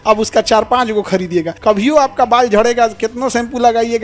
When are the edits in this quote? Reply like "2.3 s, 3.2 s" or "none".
1.5 s